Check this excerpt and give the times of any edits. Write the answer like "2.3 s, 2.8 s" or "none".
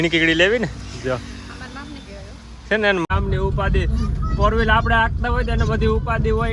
3.1 s